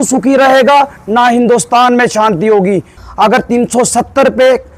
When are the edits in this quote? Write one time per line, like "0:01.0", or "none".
0:03.0